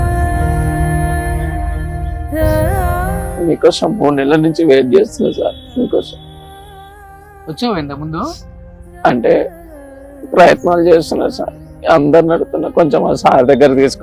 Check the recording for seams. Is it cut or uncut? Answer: uncut